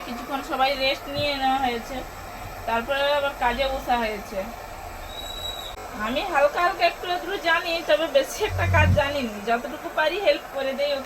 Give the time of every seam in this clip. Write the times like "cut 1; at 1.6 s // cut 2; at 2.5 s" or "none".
cut 1; at 5.8 s